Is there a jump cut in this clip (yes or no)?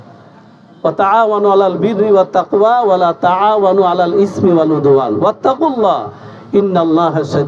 no